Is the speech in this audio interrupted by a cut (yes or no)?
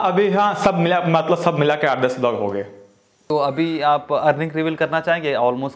no